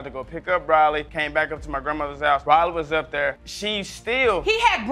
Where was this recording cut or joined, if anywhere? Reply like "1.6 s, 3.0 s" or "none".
none